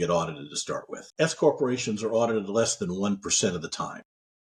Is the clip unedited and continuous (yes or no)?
yes